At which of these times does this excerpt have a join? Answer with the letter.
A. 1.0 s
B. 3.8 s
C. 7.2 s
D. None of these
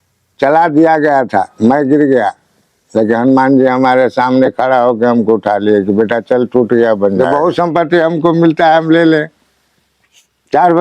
C